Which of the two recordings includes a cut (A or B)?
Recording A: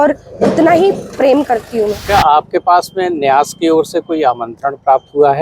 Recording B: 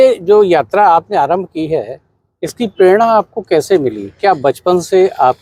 A